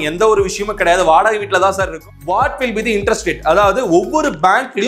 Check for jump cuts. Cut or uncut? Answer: cut